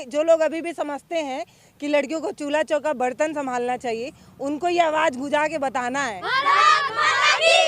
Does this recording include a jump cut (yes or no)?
yes